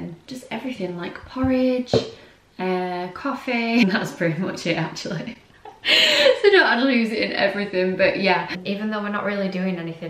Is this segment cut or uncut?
cut